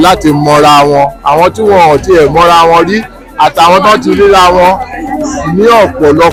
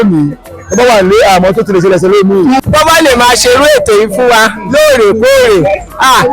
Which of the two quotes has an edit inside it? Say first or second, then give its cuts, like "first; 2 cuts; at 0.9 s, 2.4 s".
second; 1 cut; at 2.6 s